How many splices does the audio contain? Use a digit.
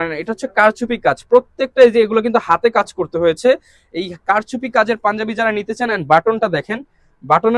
0